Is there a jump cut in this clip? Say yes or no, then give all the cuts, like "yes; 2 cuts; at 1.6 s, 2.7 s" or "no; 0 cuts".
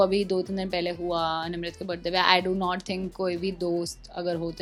no; 0 cuts